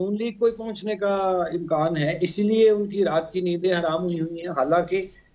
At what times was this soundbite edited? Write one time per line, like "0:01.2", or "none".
none